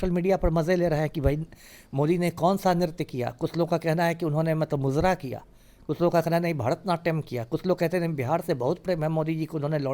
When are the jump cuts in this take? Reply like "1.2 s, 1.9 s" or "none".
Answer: none